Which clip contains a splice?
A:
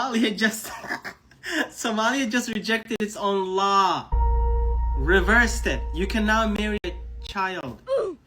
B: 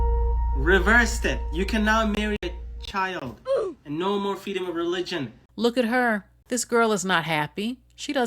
B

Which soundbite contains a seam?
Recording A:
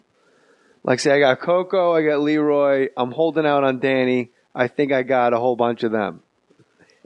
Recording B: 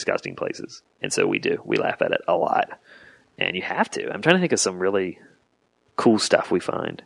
B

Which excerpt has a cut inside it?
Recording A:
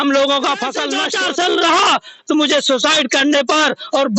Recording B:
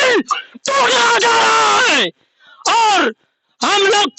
A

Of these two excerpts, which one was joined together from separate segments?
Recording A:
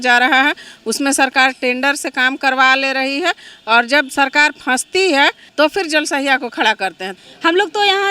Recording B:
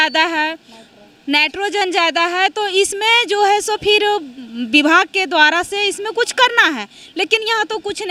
A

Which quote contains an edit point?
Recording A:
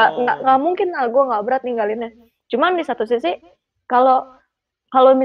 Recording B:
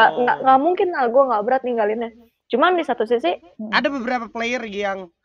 B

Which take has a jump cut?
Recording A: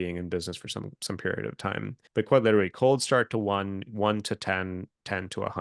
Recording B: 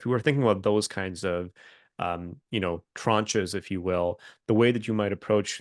A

